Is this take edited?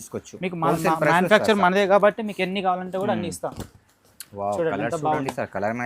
no; 0 cuts

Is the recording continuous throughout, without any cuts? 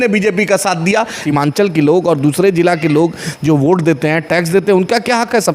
no; 1 cut; at 1.2 s

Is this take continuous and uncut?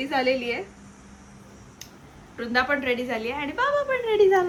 yes; 0 cuts

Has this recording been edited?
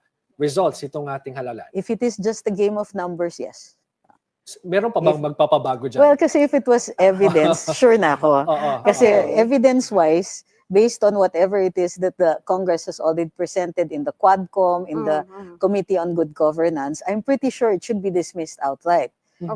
no; 0 cuts

